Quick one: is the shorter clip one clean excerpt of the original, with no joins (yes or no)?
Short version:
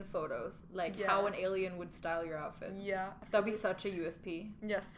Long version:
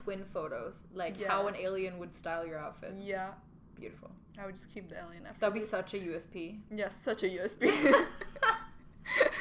no